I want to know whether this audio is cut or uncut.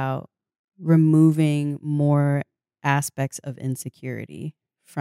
uncut